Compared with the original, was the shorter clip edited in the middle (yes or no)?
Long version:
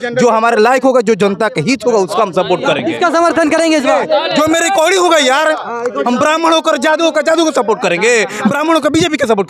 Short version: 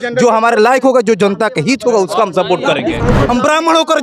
yes